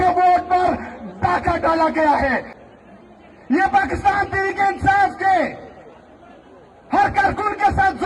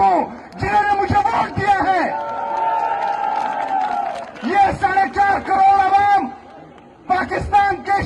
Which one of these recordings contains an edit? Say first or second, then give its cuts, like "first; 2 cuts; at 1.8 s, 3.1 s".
first; 1 cut; at 2.5 s